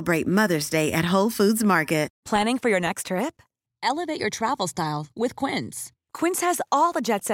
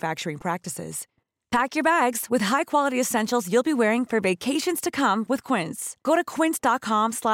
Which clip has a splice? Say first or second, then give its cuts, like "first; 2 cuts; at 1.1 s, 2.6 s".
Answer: first; 1 cut; at 2.2 s